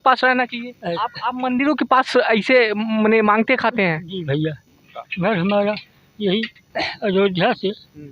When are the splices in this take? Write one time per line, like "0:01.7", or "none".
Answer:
0:00.9
0:05.0